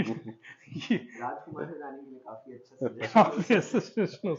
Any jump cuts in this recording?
no; 0 cuts

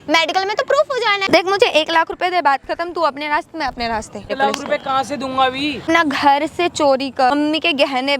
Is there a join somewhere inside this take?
yes; 4 cuts; at 1.2 s, 4.3 s, 5.8 s, 7.3 s

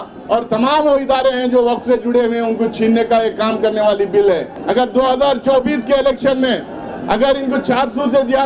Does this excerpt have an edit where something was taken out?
yes; 1 cut; at 4.5 s

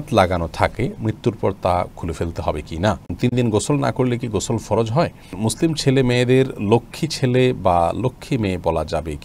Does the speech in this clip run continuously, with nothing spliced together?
no; 2 cuts; at 3.1 s, 5.4 s

